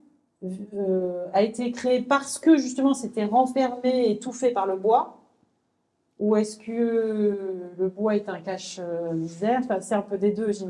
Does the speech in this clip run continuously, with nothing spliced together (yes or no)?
yes